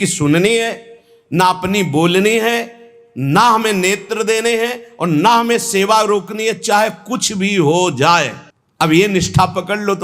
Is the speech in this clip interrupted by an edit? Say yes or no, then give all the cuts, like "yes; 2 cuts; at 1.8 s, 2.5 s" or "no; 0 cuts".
no; 0 cuts